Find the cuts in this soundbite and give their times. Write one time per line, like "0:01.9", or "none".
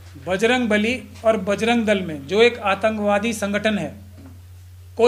none